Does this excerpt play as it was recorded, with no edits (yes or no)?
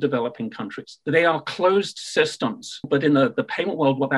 no